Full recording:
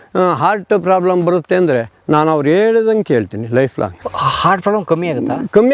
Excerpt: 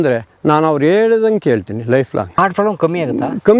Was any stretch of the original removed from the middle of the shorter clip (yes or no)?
yes